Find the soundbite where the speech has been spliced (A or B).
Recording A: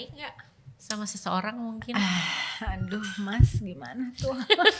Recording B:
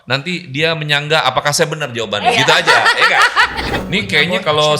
B